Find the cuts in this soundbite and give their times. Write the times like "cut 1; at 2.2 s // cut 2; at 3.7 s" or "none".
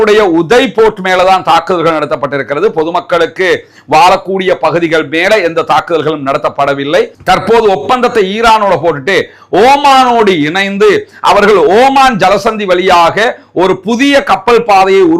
cut 1; at 7.2 s